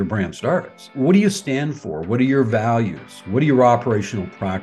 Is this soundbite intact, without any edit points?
no; 1 cut; at 0.9 s

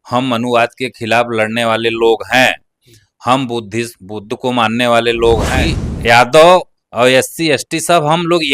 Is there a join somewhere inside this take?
yes; 1 cut; at 5.5 s

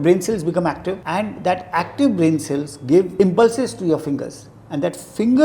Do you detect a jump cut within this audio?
yes; 2 cuts; at 1.0 s, 3.1 s

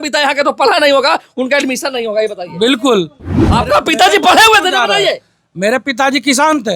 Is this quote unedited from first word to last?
no; 1 cut; at 3.4 s

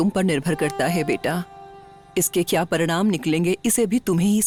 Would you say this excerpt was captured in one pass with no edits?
yes; 0 cuts

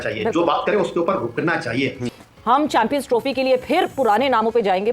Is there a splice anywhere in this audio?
yes; 1 cut; at 2.1 s

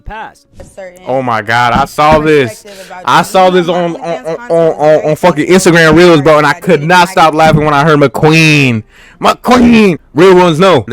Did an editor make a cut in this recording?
yes; 1 cut; at 10.0 s

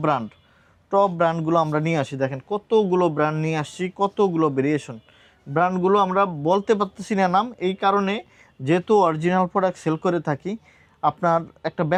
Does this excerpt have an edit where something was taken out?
no; 0 cuts

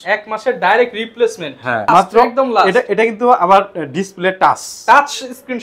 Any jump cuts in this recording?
yes; 1 cut; at 1.9 s

